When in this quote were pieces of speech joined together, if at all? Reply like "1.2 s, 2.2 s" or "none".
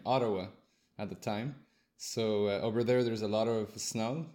none

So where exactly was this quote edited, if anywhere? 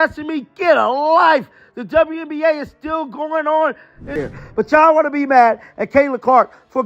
4.2 s

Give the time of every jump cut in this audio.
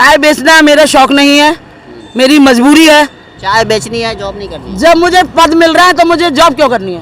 3.3 s

